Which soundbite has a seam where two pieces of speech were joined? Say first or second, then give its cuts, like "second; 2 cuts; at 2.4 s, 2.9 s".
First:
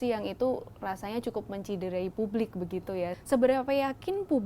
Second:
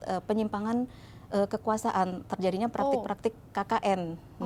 first; 1 cut; at 3.2 s